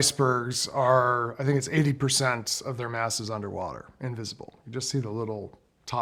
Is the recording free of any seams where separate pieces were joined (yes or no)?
yes